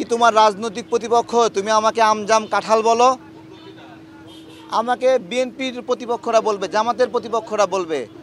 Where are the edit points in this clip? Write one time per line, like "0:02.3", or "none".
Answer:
none